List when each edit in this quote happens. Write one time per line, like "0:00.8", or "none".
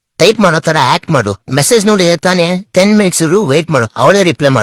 none